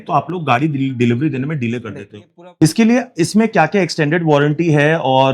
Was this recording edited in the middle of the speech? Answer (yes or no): yes